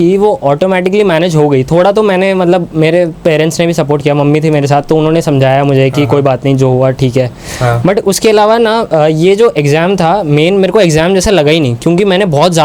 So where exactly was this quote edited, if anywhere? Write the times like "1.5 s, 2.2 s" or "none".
none